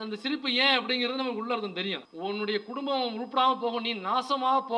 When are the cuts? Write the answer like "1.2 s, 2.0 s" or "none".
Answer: 2.1 s